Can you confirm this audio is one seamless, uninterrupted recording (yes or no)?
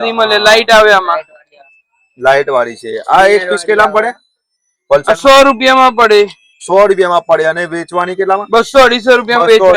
yes